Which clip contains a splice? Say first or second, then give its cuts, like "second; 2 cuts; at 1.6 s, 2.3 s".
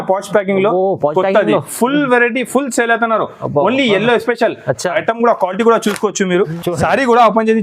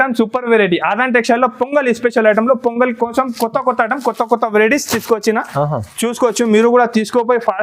first; 1 cut; at 6.6 s